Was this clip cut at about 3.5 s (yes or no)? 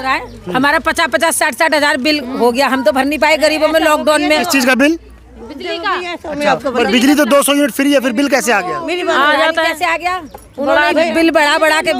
no